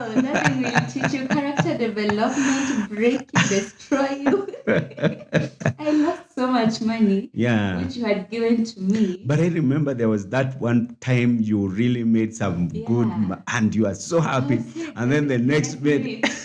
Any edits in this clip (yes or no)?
no